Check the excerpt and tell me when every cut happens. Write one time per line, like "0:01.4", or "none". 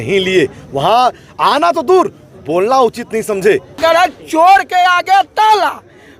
0:03.8